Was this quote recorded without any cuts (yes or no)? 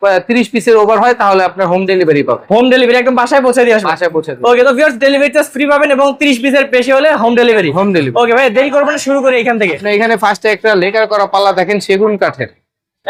yes